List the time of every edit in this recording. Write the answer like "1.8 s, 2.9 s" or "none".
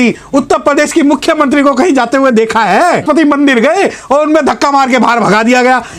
3.0 s